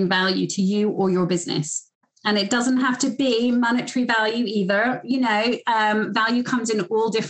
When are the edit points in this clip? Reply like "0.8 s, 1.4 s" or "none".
2.0 s